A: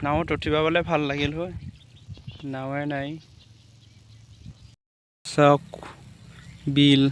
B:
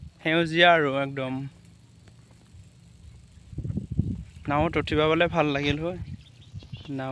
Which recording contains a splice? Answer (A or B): A